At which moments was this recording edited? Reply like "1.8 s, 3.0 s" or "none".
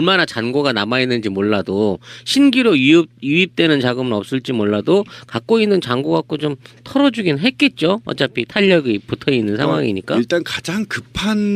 8.0 s